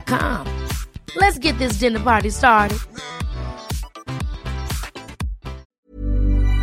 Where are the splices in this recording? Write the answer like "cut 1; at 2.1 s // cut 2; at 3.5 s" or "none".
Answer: cut 1; at 5.6 s